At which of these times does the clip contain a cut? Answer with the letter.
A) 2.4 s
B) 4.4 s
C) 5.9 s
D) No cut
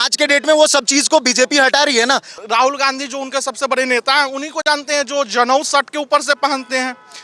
A